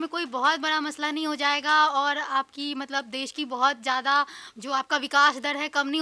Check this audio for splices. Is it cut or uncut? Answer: uncut